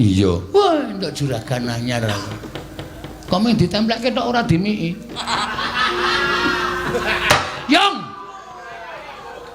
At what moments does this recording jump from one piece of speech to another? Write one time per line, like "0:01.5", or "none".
0:02.1